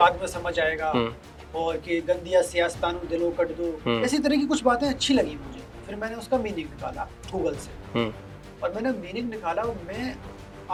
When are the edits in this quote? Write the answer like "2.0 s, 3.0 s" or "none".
none